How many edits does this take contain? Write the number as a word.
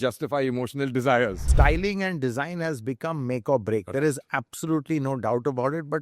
one